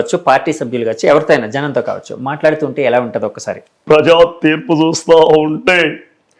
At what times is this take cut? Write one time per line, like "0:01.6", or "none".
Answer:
0:03.5